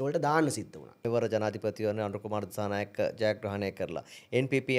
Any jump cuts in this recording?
yes; 1 cut; at 1.0 s

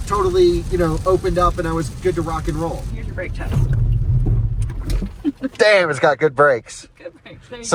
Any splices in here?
yes; 1 cut; at 3.0 s

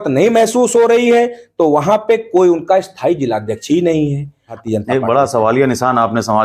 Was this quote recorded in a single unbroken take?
no; 1 cut; at 4.6 s

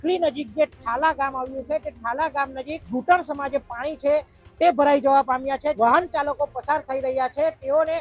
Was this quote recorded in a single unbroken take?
no; 2 cuts; at 2.8 s, 5.7 s

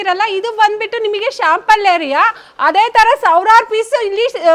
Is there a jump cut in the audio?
no; 0 cuts

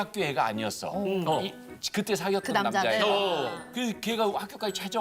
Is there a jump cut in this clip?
no; 0 cuts

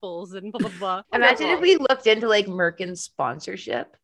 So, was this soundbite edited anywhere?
yes; 1 cut; at 1.0 s

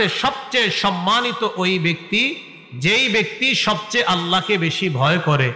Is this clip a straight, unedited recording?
yes; 0 cuts

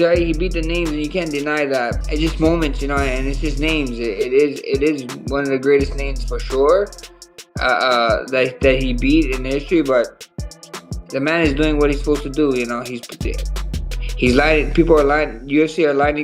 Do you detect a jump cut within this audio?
yes; 1 cut; at 2.0 s

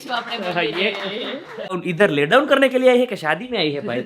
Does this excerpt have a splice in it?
yes; 1 cut; at 1.8 s

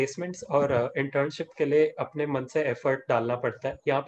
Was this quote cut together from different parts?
no; 0 cuts

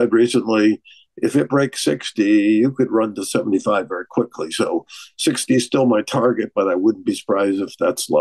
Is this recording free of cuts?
yes; 0 cuts

